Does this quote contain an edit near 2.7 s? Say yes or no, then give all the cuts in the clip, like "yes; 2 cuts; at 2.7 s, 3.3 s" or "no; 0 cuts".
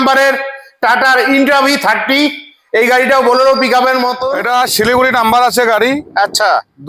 no; 1 cut; at 4.3 s